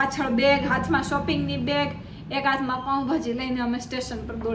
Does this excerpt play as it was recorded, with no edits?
yes; 0 cuts

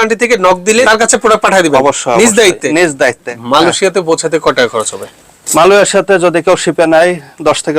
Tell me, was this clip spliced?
yes; 2 cuts; at 0.9 s, 3.3 s

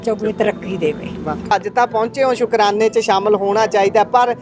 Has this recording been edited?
yes; 1 cut; at 1.5 s

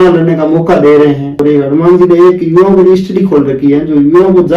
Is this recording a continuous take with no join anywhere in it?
no; 1 cut; at 1.4 s

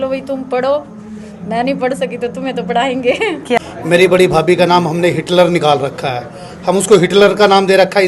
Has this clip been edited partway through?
yes; 1 cut; at 3.6 s

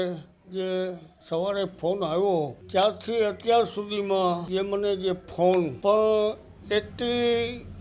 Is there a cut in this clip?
yes; 4 cuts; at 1.1 s, 2.6 s, 4.4 s, 5.7 s

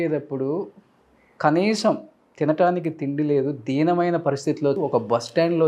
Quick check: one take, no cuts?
no; 1 cut; at 4.8 s

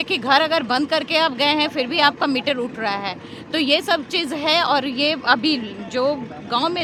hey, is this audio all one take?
yes; 0 cuts

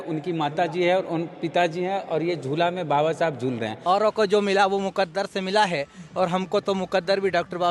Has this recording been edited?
yes; 1 cut; at 3.7 s

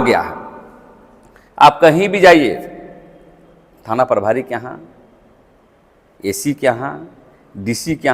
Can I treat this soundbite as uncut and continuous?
yes; 0 cuts

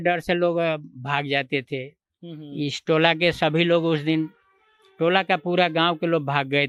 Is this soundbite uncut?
yes; 0 cuts

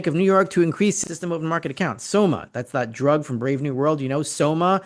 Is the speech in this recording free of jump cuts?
no; 1 cut; at 1.0 s

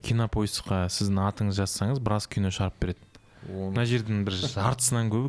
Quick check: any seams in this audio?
no; 0 cuts

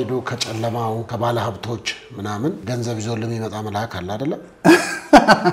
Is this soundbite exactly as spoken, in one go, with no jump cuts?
no; 2 cuts; at 1.1 s, 2.6 s

